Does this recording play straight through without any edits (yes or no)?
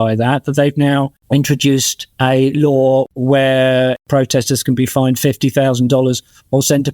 no